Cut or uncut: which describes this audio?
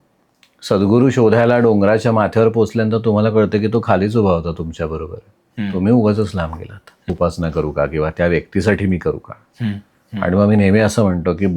cut